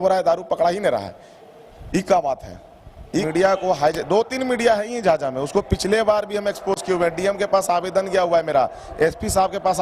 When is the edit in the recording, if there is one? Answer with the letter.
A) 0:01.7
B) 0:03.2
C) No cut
B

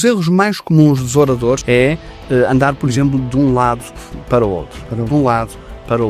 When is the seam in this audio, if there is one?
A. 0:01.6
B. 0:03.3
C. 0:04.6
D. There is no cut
A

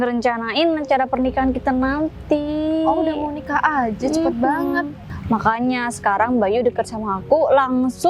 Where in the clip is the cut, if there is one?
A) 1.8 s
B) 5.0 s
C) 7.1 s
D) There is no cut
B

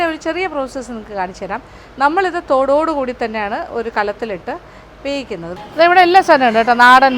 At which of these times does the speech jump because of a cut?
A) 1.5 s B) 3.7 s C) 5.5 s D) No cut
C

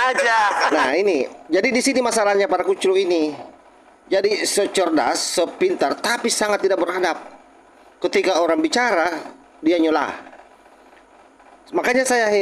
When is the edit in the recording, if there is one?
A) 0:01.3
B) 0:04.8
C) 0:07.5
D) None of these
D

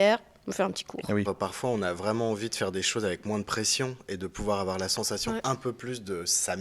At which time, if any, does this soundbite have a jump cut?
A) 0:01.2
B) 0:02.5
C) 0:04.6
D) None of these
A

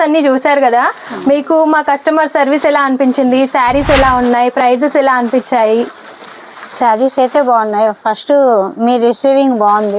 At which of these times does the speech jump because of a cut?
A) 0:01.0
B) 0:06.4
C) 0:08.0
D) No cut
D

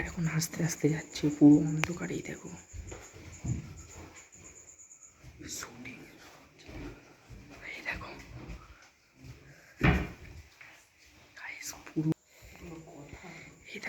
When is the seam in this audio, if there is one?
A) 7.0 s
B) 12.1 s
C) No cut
B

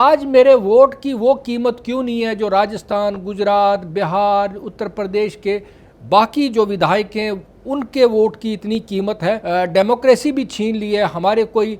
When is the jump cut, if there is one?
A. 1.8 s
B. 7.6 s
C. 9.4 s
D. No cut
C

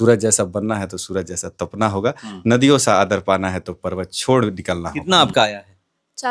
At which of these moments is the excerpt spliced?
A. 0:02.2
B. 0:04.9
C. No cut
B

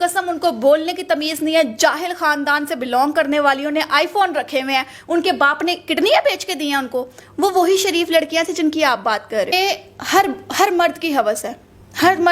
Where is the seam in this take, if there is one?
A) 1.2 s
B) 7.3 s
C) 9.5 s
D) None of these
C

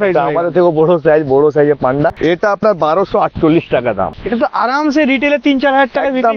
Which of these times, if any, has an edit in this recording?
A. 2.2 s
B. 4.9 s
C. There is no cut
A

